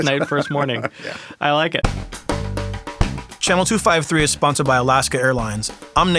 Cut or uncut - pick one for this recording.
cut